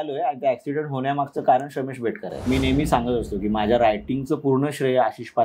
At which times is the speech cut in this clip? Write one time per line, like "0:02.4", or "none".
0:02.4